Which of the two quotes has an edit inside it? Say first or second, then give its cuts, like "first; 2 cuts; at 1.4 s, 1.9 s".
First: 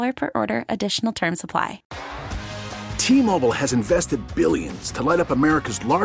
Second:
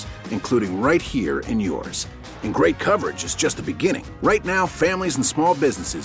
first; 1 cut; at 1.9 s